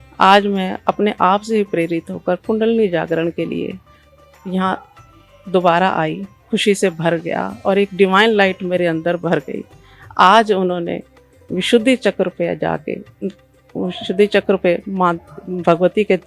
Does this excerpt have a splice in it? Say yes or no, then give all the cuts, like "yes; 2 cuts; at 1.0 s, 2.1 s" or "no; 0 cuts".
yes; 1 cut; at 6.3 s